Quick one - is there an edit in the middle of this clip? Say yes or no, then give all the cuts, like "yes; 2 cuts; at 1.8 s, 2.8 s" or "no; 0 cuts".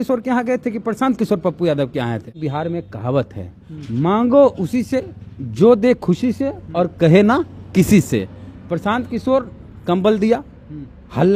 yes; 1 cut; at 2.4 s